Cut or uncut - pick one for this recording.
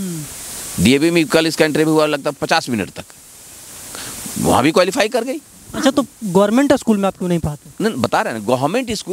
uncut